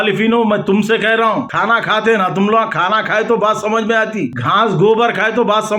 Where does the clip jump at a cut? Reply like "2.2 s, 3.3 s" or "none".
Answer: 1.5 s, 4.4 s